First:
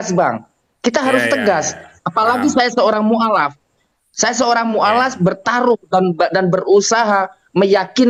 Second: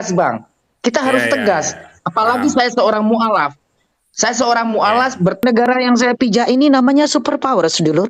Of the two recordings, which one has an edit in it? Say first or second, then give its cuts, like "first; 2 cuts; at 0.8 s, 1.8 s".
second; 1 cut; at 5.4 s